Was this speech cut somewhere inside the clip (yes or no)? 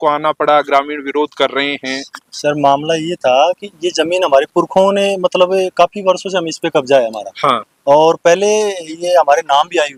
no